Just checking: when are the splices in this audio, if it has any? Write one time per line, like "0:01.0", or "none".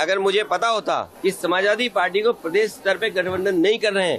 0:01.1

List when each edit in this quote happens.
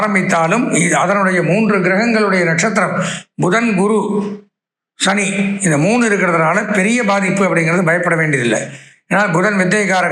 none

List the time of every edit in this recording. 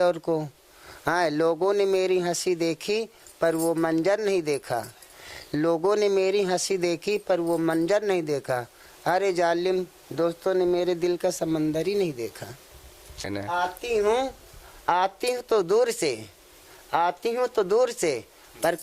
0:13.3

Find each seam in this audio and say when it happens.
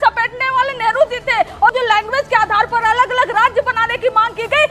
0:01.7

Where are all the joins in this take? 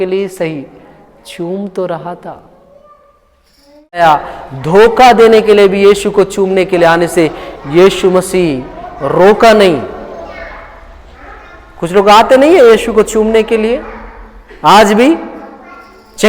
0:04.0

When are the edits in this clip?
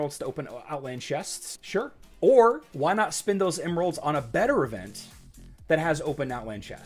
0:01.6
0:02.7

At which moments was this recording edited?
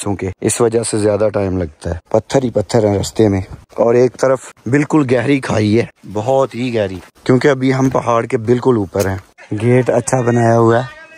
none

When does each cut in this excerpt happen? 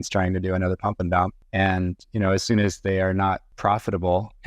0:01.4
0:03.5

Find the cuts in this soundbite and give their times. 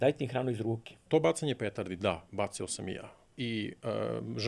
0:01.0

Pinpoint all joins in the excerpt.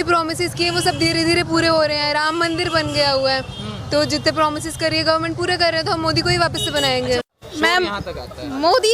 0:07.4

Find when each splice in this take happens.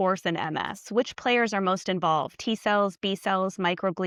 none

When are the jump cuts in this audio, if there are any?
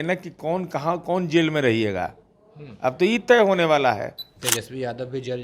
0:04.3

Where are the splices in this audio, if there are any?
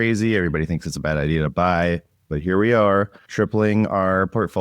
0:03.2

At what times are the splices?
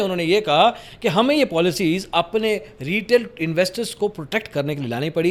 none

